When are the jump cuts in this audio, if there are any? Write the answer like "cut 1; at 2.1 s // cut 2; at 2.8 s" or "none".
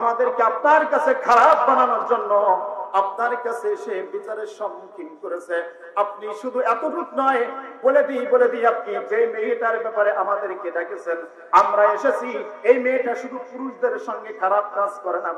none